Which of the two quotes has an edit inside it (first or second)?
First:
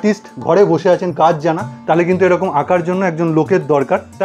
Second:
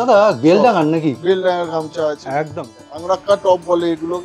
second